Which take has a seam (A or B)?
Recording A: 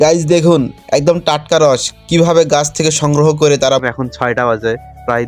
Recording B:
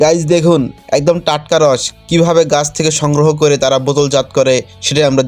A